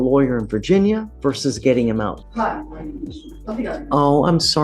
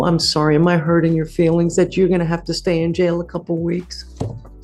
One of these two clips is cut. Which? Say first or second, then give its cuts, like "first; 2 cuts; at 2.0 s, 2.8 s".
first; 3 cuts; at 1.1 s, 2.2 s, 3.3 s